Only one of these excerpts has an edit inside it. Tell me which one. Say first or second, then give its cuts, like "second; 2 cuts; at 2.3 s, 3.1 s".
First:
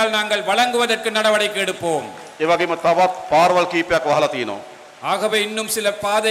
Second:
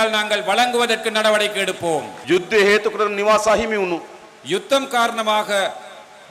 second; 1 cut; at 2.1 s